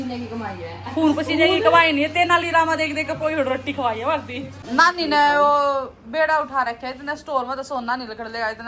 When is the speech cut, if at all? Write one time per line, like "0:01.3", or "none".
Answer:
0:04.6